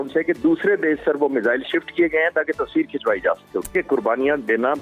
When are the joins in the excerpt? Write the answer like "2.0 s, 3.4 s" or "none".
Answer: 3.7 s